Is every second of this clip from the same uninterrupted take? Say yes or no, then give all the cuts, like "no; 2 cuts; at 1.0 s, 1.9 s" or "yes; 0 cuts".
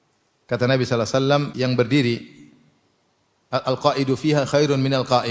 no; 1 cut; at 1.5 s